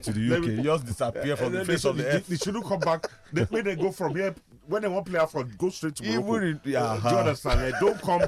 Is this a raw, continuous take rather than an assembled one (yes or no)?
yes